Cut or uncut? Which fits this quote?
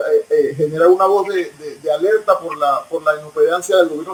uncut